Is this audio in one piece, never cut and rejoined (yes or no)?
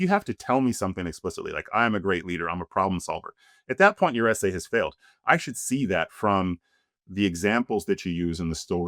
yes